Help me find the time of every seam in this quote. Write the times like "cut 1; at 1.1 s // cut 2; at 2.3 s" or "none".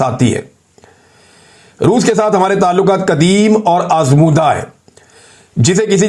none